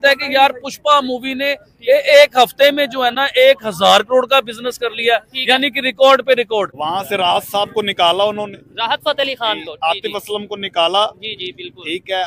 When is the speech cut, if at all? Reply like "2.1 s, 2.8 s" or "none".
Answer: 6.8 s